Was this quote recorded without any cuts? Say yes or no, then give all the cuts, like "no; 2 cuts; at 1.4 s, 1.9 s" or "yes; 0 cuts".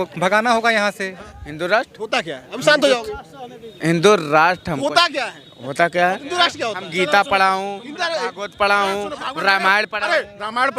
no; 2 cuts; at 1.3 s, 6.2 s